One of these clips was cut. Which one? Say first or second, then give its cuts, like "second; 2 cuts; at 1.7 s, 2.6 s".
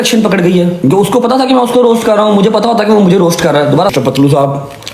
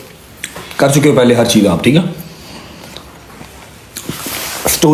first; 1 cut; at 3.9 s